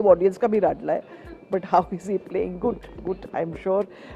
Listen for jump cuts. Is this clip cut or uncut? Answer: uncut